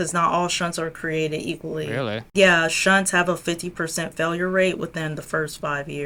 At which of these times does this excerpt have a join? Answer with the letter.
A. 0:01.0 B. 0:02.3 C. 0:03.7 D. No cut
D